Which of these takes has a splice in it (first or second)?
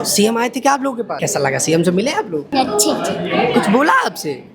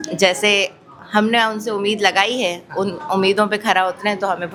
first